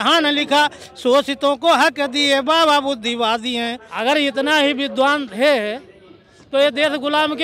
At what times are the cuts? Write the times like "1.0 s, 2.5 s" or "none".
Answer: 3.9 s